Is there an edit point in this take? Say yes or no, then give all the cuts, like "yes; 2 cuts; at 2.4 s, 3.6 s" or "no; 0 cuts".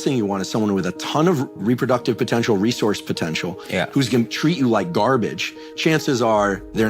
no; 0 cuts